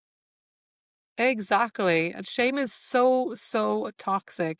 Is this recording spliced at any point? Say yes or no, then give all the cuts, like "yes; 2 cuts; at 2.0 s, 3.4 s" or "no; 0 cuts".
no; 0 cuts